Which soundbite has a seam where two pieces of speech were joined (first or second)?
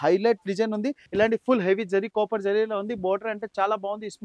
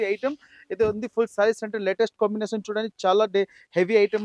first